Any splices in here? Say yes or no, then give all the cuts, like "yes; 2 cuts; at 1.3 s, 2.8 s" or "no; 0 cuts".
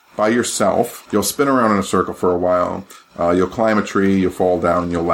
yes; 1 cut; at 1.0 s